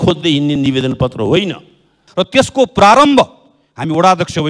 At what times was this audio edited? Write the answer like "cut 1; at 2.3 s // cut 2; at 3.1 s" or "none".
cut 1; at 2.0 s